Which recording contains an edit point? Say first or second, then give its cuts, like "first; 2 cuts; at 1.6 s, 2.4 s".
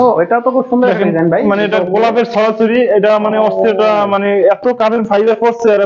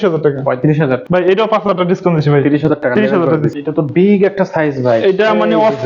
second; 2 cuts; at 1.0 s, 3.5 s